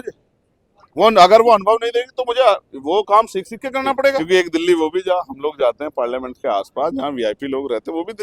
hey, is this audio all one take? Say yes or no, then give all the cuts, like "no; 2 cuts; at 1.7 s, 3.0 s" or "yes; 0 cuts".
no; 1 cut; at 4.2 s